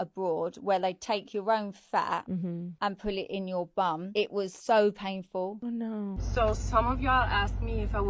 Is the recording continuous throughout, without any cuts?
no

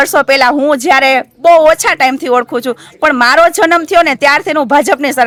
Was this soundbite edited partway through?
no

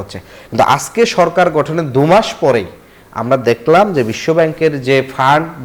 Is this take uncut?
yes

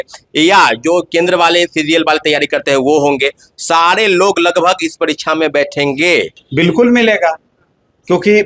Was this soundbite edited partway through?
yes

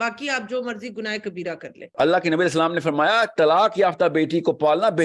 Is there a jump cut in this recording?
yes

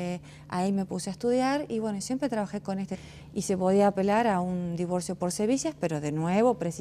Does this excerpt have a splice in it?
no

